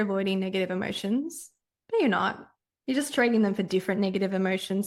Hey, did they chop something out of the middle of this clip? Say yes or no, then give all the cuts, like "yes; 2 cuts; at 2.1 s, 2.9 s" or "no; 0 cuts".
no; 0 cuts